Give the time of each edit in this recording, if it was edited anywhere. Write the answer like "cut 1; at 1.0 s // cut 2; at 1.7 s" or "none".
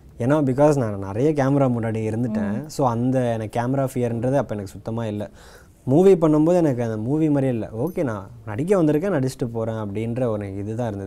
none